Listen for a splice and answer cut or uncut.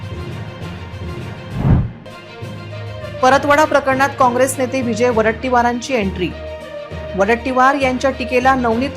cut